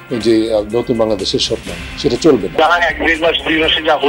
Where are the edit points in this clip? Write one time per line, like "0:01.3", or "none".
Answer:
0:02.5

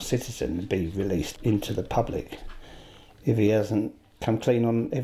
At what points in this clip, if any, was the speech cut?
0:01.3
0:04.1

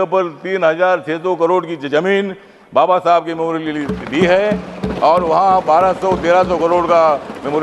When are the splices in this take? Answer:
none

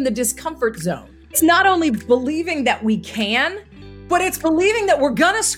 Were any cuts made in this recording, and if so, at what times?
0:01.4

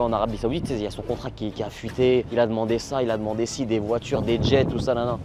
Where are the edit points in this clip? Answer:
none

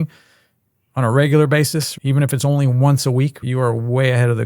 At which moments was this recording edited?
0:01.9
0:03.4

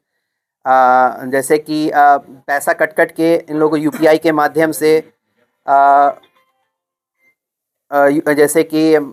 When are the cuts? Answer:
none

